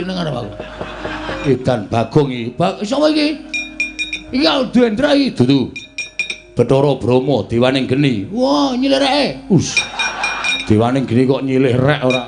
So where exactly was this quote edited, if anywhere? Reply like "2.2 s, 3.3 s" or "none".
1.4 s, 10.5 s